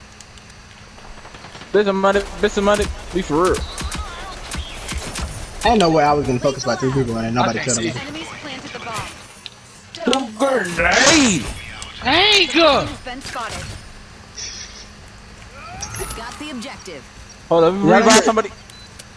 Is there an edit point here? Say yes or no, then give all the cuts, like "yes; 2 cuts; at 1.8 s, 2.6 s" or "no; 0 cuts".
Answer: no; 0 cuts